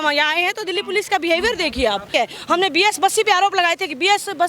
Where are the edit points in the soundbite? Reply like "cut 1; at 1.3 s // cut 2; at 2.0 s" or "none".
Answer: cut 1; at 2.1 s